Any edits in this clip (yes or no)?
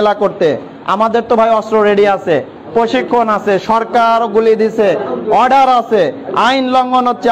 no